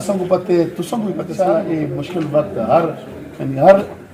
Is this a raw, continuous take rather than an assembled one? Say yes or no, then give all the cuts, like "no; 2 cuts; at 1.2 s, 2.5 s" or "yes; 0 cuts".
no; 1 cut; at 1.3 s